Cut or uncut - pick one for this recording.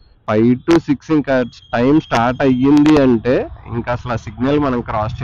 uncut